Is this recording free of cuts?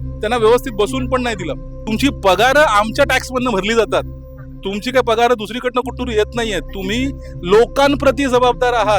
no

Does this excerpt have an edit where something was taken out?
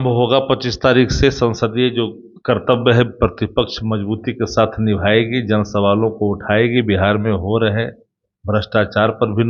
no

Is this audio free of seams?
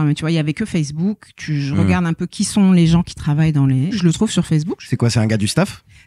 no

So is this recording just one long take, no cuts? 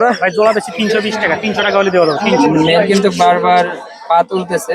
no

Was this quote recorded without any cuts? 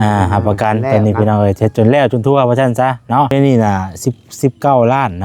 no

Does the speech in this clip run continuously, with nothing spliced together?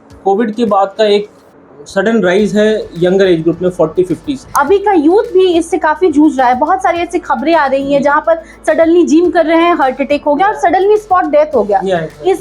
no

